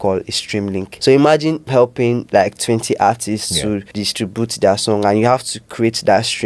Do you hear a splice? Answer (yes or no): yes